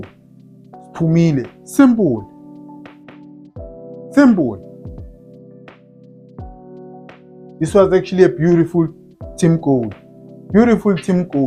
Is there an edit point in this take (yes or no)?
no